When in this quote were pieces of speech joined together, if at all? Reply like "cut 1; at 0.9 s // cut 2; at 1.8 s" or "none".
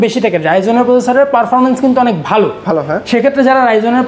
none